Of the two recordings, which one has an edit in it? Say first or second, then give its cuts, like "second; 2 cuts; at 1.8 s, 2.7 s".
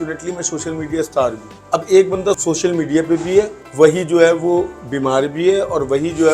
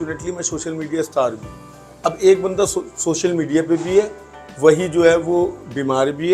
first; 3 cuts; at 1.5 s, 2.4 s, 3.6 s